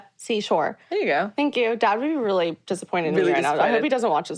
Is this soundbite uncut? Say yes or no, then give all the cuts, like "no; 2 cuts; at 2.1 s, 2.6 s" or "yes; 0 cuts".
yes; 0 cuts